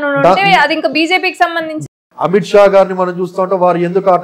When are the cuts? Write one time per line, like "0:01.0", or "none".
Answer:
0:01.9